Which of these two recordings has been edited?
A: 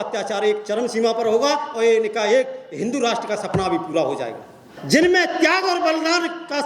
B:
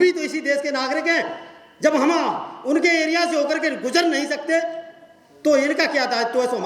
A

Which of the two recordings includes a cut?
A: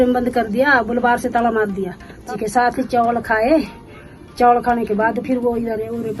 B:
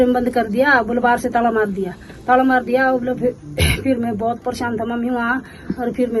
A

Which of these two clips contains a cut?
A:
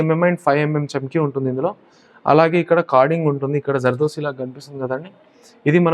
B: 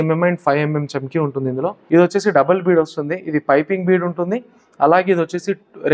B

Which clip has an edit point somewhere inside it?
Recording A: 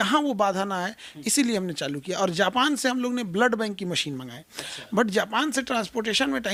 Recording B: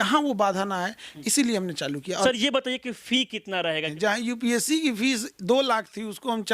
B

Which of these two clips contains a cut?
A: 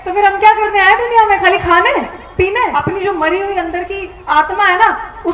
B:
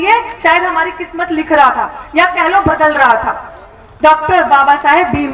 A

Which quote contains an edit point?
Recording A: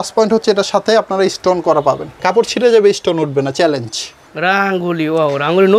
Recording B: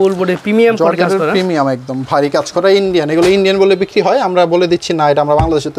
A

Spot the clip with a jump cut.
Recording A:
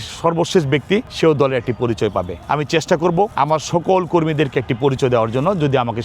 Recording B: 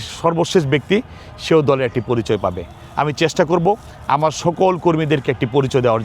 A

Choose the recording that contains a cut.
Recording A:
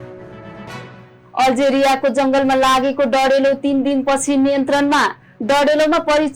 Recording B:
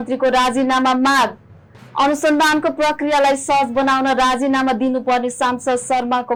A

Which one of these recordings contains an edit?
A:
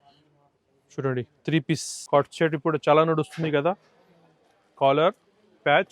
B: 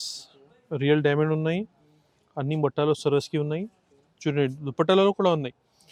A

